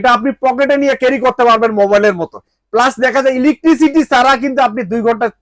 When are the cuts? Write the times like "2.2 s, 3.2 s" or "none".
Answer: none